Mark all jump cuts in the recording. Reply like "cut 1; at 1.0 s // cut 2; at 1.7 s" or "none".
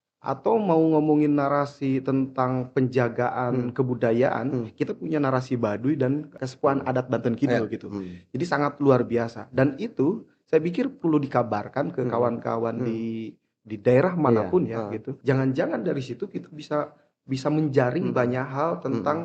cut 1; at 6.3 s // cut 2; at 15.1 s